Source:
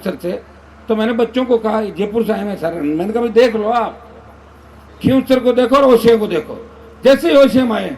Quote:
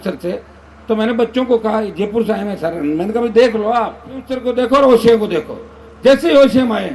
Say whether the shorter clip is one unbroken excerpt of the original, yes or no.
no